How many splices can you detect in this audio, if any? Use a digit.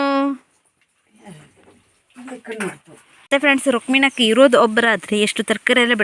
1